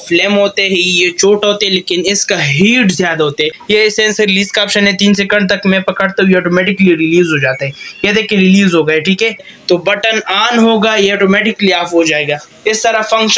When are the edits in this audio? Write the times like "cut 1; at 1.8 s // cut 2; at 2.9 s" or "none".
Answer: cut 1; at 3.5 s // cut 2; at 9.5 s